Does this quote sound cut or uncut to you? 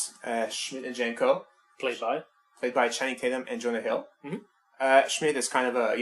cut